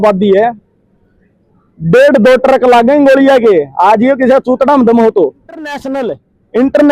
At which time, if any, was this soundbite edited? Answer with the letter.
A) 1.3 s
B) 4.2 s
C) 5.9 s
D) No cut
C